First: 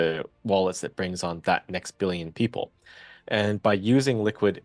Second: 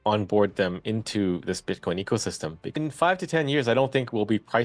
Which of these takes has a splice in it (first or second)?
second